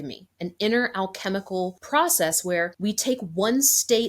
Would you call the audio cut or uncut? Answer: cut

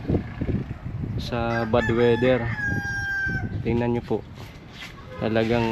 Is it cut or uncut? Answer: uncut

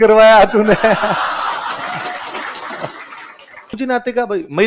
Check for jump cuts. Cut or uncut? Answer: cut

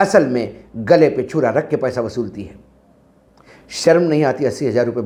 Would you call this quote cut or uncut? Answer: uncut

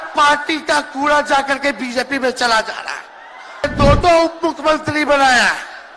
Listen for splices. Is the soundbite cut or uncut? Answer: cut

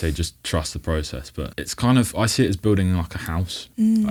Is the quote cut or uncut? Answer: uncut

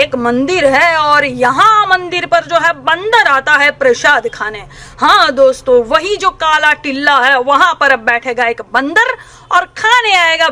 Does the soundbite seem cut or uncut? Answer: uncut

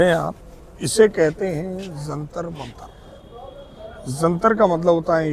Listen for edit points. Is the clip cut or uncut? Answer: uncut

